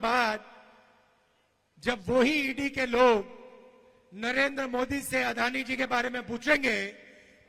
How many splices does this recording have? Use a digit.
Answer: 0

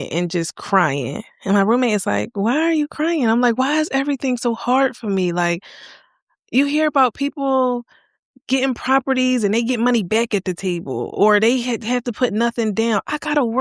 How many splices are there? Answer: 0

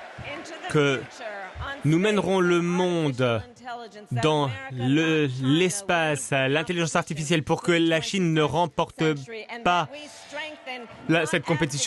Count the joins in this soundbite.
0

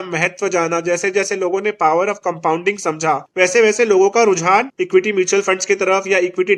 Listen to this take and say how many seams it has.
2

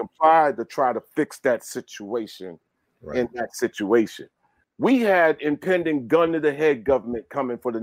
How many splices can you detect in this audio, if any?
1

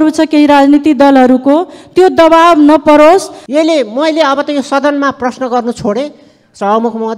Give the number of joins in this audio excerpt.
1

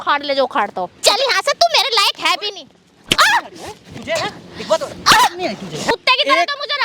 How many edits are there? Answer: 2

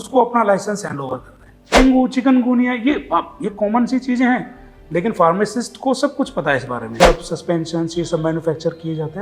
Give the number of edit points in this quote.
2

